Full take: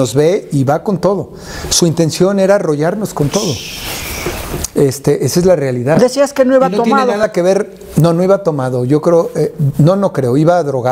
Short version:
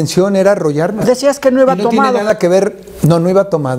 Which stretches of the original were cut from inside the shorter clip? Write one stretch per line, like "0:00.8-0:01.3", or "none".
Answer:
0:03.1-0:06.0